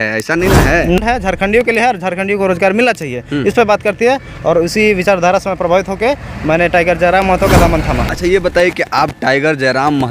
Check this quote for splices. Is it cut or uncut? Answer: cut